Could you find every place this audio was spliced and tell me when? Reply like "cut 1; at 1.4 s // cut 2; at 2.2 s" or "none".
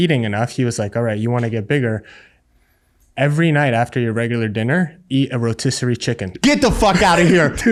none

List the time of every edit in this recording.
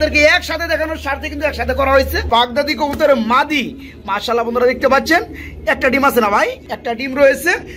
cut 1; at 2.3 s // cut 2; at 6.7 s

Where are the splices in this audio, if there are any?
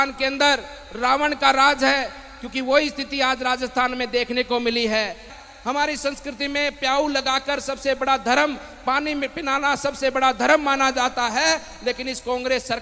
cut 1; at 5.3 s

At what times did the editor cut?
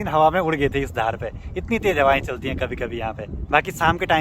none

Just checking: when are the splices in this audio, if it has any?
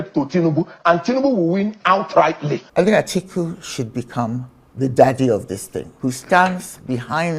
cut 1; at 2.6 s // cut 2; at 5.8 s

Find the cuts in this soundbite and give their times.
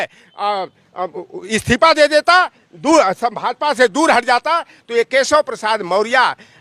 none

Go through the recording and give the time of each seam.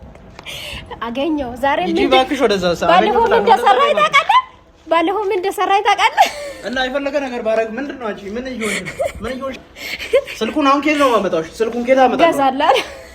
cut 1; at 9.6 s

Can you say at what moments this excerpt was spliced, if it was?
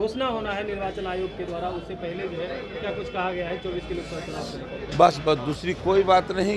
none

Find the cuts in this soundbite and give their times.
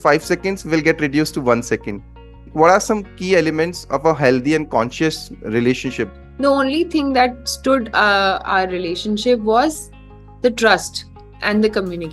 cut 1; at 2.5 s // cut 2; at 6.1 s

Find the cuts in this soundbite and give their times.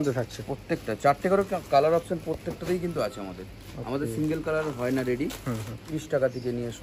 cut 1; at 5.8 s

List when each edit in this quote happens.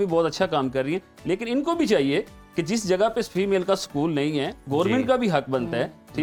none

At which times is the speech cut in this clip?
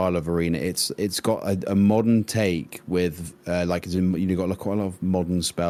none

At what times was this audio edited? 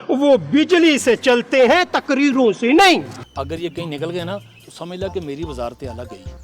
cut 1; at 3.1 s

